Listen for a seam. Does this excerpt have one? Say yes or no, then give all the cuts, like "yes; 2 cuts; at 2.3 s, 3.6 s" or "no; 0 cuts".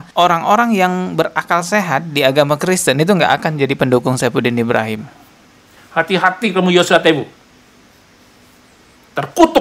no; 0 cuts